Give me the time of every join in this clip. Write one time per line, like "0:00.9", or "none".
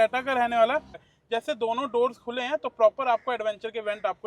0:01.0